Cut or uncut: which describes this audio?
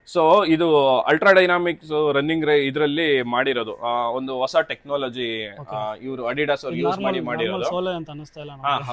uncut